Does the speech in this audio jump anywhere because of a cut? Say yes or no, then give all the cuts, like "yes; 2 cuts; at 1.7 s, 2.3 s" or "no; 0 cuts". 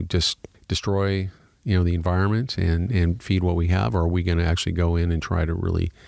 no; 0 cuts